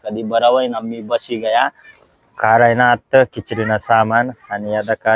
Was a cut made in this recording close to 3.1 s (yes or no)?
no